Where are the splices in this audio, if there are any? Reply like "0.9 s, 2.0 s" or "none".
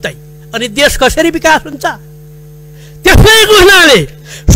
none